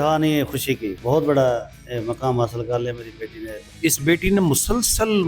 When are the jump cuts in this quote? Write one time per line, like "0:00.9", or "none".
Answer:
0:01.0
0:03.7

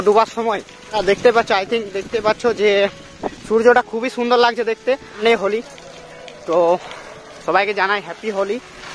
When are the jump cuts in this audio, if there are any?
0:01.0
0:05.2

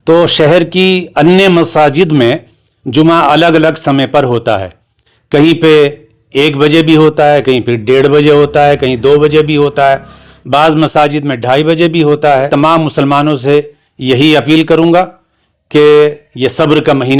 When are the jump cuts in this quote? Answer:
0:12.5

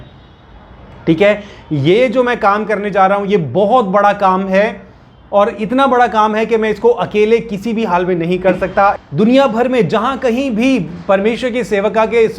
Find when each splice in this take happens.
0:09.0

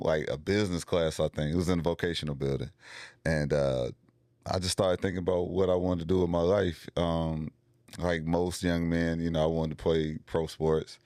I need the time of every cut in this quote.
none

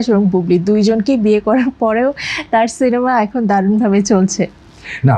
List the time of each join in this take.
none

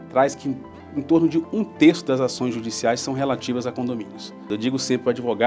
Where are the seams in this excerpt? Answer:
0:04.5

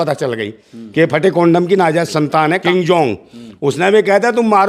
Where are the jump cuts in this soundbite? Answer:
0:02.6

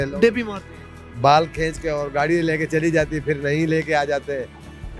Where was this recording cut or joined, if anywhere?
none

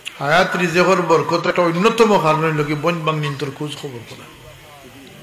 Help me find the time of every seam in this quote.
0:01.5

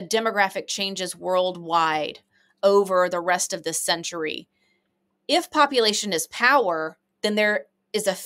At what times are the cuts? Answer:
none

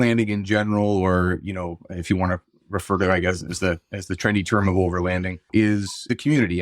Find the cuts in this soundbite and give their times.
0:05.5

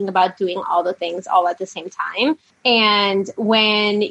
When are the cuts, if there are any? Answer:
none

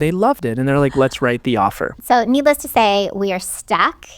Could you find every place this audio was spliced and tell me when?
0:01.9

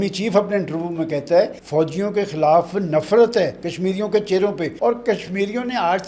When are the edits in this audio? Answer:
0:01.6
0:04.7

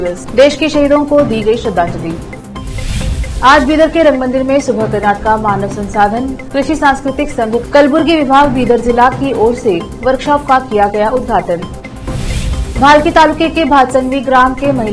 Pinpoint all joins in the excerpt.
none

